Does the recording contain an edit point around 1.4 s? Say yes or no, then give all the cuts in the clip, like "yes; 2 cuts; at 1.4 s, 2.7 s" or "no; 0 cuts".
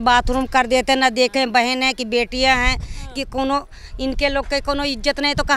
no; 0 cuts